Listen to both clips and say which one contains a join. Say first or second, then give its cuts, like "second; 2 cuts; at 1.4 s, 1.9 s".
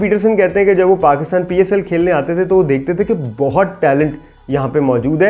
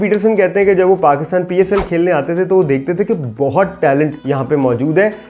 second; 1 cut; at 4.2 s